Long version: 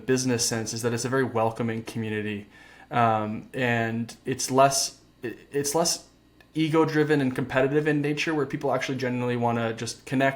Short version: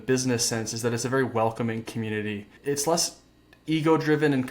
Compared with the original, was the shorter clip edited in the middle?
yes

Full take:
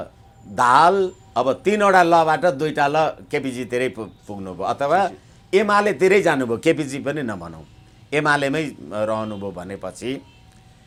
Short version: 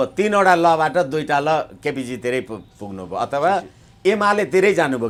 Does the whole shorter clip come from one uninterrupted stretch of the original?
yes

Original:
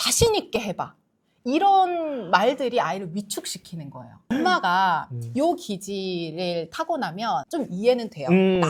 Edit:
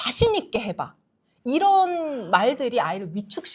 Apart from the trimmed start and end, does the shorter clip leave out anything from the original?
no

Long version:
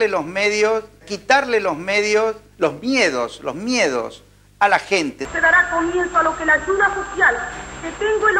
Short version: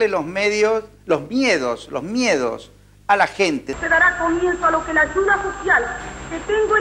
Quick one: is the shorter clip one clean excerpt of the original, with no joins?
no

